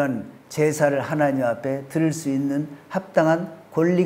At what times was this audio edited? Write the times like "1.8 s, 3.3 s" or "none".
none